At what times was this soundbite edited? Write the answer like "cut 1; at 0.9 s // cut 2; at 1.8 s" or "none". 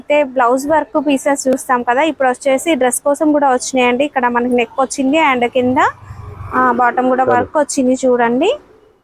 none